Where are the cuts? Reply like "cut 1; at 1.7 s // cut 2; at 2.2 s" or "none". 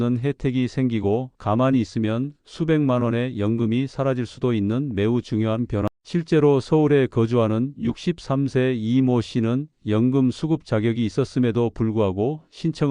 cut 1; at 1.3 s // cut 2; at 5.9 s